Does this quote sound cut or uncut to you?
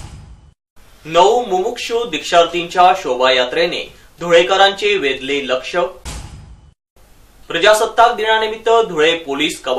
uncut